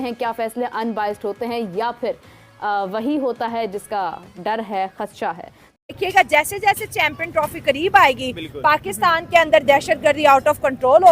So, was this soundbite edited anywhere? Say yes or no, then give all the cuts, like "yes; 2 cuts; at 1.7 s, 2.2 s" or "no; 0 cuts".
yes; 1 cut; at 5.9 s